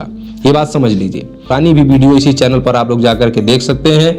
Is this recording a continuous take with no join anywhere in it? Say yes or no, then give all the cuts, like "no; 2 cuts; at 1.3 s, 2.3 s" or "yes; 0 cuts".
no; 1 cut; at 1.5 s